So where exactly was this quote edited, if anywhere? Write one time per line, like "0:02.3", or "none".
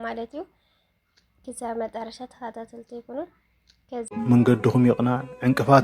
0:04.1